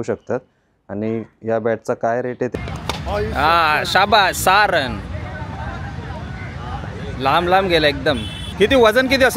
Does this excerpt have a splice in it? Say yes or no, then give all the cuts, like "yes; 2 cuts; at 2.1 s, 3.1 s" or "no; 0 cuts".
yes; 2 cuts; at 2.5 s, 8.4 s